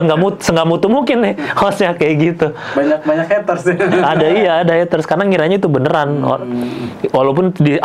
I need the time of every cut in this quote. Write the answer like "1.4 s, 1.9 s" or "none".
none